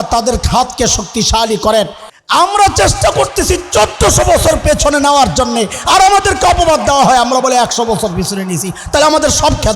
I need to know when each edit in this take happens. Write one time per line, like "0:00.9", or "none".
0:02.0